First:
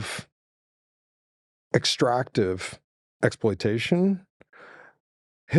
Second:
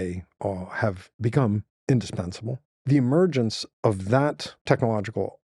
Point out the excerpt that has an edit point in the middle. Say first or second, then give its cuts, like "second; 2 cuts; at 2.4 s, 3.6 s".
second; 3 cuts; at 1.7 s, 2.7 s, 4.5 s